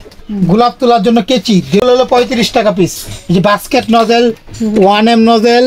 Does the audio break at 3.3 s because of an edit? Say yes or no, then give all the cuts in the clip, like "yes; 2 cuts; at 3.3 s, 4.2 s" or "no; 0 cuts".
no; 1 cut; at 1.8 s